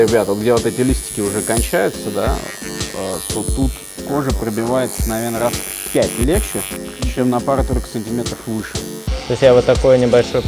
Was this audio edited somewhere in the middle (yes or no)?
yes